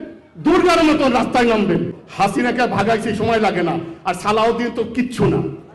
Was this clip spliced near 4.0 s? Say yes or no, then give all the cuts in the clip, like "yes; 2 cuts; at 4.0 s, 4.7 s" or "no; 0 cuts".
no; 1 cut; at 2.0 s